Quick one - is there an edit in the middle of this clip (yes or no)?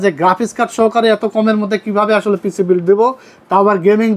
no